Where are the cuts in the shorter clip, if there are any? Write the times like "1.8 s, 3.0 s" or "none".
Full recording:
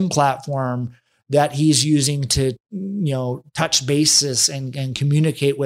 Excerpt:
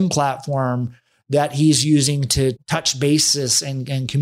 2.6 s